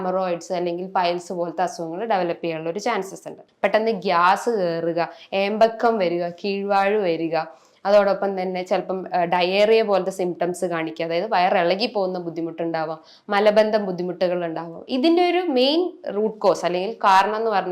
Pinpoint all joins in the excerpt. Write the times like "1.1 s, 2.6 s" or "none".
3.4 s